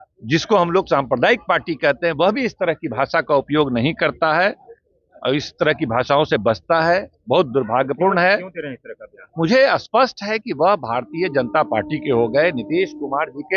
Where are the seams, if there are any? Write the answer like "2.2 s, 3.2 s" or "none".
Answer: none